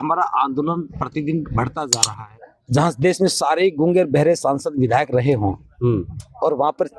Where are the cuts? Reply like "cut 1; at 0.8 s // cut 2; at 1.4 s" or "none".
cut 1; at 2.1 s